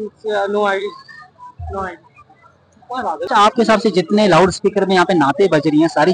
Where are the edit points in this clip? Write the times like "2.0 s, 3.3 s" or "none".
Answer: 3.3 s